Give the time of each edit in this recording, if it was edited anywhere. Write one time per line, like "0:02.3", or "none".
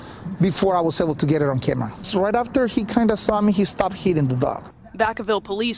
0:01.6